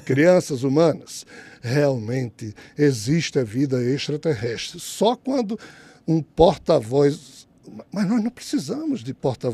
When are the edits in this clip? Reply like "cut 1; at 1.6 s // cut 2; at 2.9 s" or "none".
none